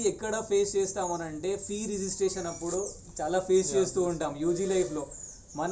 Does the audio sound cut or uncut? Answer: uncut